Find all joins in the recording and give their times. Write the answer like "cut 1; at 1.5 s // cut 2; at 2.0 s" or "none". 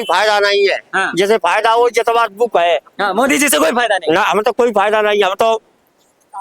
none

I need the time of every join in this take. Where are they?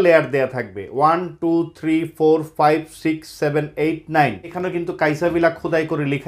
cut 1; at 4.6 s

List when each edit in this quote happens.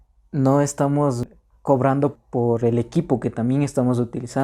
cut 1; at 1.2 s // cut 2; at 2.2 s

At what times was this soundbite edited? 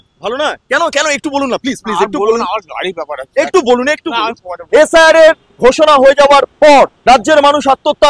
cut 1; at 4.5 s // cut 2; at 5.5 s // cut 3; at 7.0 s

